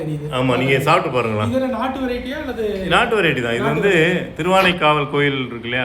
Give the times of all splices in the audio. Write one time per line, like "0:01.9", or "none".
none